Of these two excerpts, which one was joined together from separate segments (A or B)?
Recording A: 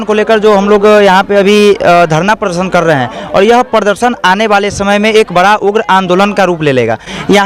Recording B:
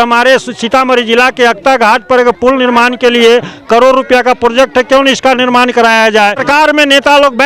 B